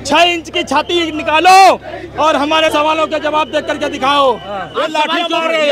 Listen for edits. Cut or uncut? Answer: cut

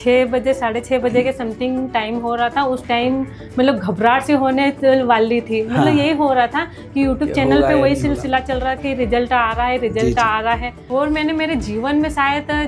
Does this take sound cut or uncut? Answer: cut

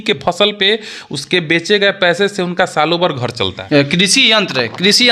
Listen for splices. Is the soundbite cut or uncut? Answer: cut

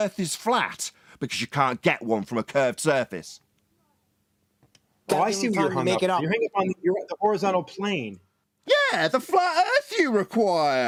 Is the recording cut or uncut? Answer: uncut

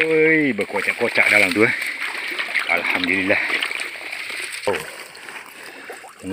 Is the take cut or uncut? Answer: cut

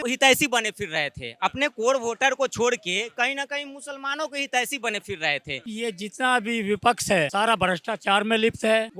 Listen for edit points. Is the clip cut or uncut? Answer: cut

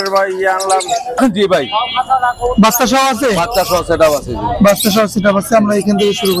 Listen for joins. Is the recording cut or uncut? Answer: cut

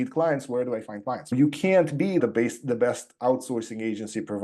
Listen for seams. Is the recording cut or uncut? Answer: cut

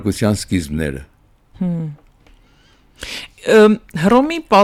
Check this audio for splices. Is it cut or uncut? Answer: uncut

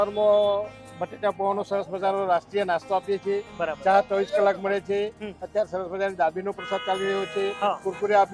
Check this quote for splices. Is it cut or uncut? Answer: uncut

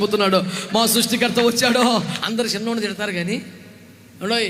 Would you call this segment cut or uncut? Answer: cut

